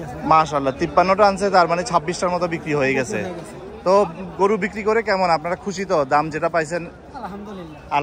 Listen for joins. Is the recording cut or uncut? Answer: uncut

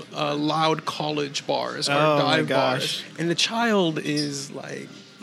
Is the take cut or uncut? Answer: uncut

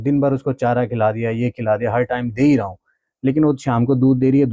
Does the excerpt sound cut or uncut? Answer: uncut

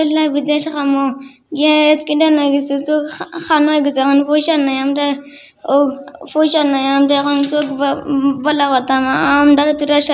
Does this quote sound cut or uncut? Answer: uncut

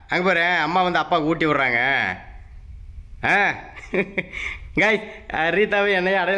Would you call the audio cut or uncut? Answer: uncut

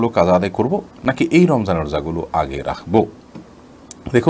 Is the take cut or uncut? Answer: uncut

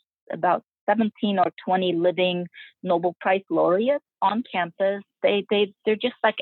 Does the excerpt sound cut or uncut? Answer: cut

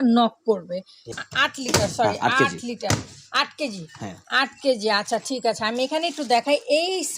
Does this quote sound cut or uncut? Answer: cut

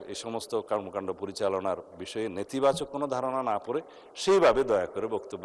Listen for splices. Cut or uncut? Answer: uncut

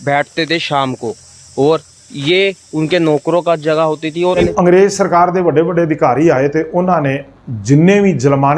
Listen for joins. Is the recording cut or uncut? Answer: cut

